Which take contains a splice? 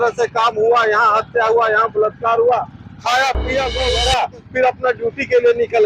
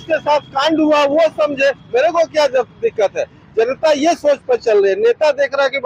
first; 1 cut; at 3.8 s

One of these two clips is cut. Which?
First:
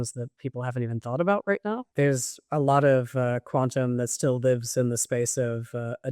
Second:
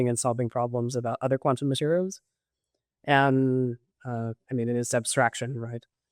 first; 1 cut; at 1.9 s

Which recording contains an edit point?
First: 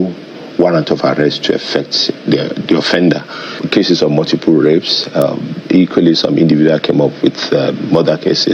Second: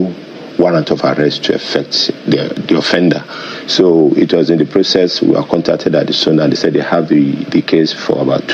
first; 1 cut; at 3.6 s

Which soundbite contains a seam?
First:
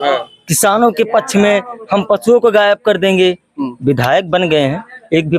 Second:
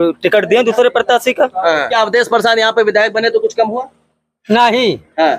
second; 1 cut; at 1.9 s

